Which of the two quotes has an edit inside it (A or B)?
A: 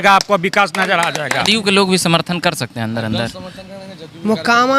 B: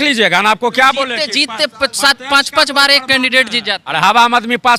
A